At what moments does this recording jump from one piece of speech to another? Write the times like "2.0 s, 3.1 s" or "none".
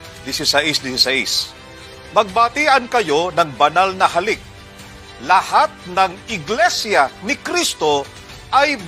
none